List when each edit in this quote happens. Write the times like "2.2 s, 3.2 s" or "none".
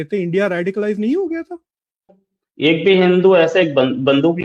2.2 s